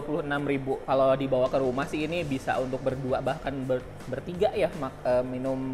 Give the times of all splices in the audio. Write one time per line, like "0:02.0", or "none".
none